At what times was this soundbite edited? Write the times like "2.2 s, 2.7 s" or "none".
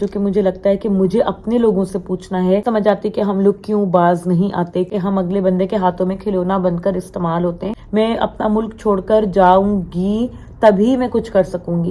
2.6 s, 4.9 s, 7.7 s